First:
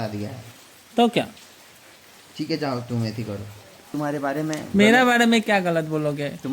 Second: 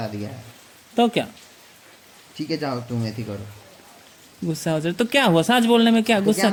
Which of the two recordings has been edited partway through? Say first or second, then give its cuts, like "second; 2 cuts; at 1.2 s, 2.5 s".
first; 1 cut; at 3.9 s